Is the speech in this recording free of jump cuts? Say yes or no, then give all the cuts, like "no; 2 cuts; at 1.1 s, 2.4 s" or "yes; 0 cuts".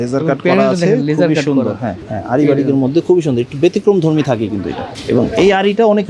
no; 2 cuts; at 2.1 s, 4.9 s